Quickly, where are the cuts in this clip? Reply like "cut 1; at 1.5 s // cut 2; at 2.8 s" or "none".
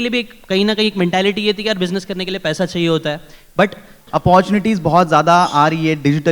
cut 1; at 4.0 s